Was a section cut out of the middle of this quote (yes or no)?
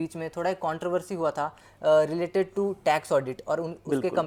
no